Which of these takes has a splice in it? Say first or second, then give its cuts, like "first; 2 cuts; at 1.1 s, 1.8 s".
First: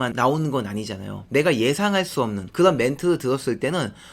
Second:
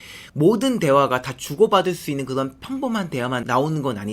first; 1 cut; at 2.4 s